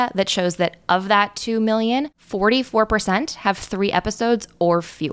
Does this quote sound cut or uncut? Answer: cut